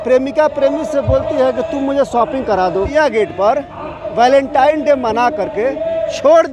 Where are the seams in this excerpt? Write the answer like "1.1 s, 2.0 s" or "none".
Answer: 2.9 s